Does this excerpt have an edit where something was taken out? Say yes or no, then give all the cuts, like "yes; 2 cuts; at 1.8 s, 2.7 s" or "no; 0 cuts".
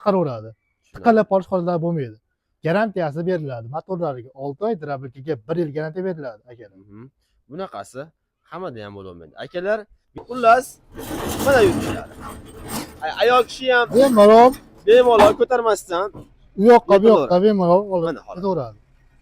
yes; 1 cut; at 10.2 s